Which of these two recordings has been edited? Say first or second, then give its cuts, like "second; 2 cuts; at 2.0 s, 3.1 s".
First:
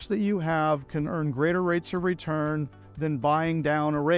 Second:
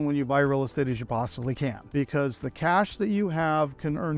second; 1 cut; at 1.8 s